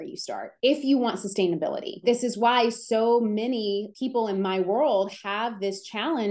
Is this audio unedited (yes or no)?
no